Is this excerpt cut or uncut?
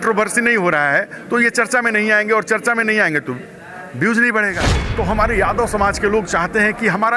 cut